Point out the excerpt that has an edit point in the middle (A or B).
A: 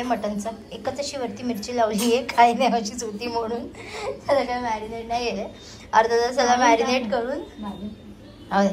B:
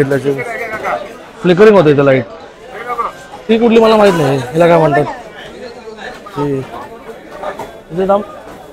B